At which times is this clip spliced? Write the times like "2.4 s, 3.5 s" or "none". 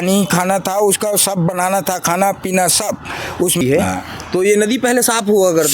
3.6 s